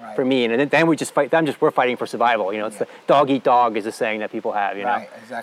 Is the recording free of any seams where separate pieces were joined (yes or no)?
yes